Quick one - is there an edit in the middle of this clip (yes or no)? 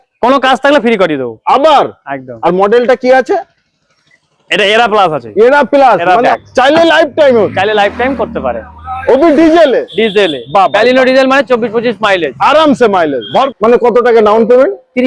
yes